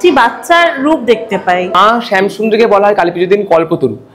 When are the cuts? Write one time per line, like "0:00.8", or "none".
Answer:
0:01.8

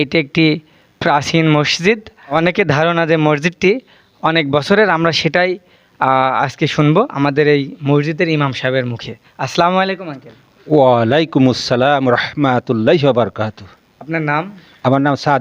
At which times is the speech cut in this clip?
0:02.3

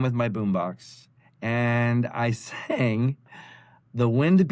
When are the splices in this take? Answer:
none

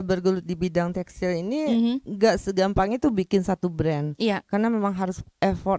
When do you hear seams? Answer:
none

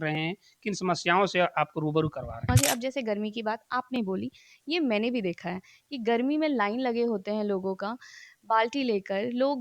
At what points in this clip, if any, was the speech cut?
0:02.5

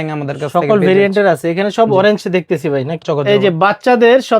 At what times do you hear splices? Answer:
0:03.1

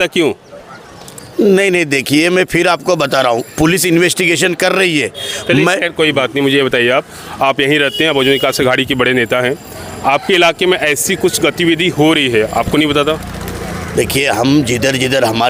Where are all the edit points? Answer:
none

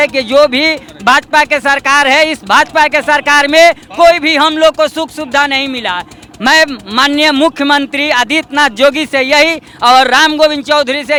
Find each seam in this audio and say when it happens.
none

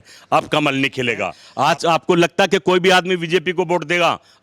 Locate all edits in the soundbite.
0:01.4

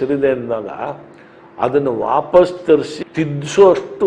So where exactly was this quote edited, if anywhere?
0:03.0

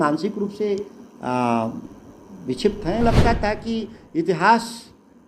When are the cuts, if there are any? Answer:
0:03.0

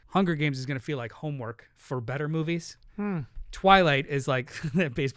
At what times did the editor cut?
none

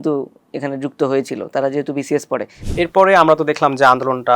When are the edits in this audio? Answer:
0:02.6

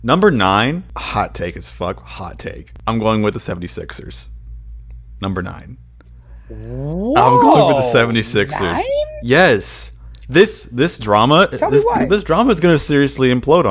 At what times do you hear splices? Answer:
0:00.9
0:02.7

